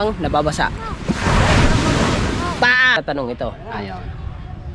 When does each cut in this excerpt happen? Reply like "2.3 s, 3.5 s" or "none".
3.0 s